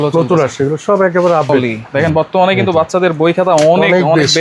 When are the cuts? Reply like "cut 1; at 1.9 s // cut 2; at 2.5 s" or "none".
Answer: cut 1; at 1.6 s